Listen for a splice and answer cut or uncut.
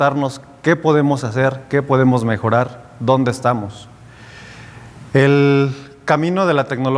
uncut